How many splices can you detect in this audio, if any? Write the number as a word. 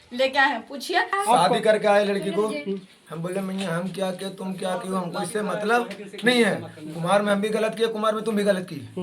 one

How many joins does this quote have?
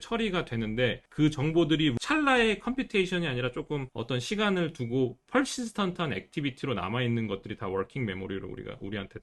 three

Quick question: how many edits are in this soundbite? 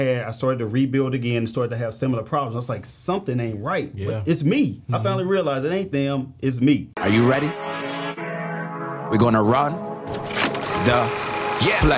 one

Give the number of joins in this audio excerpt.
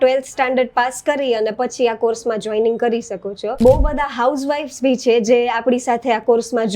one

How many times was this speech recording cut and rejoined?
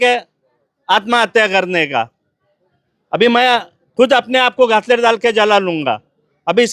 zero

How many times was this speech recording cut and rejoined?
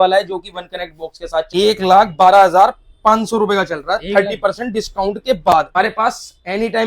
two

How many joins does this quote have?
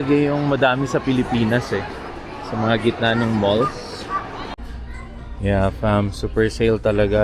one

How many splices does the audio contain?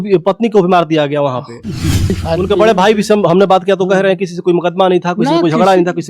one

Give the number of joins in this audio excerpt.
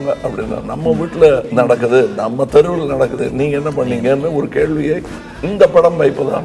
two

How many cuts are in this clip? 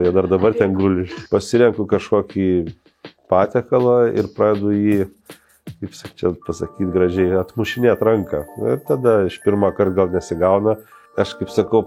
two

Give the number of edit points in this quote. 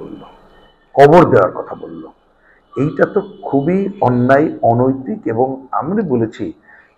zero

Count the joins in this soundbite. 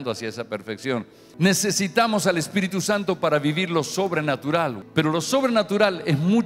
two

